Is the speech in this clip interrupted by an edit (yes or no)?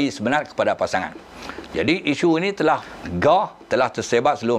yes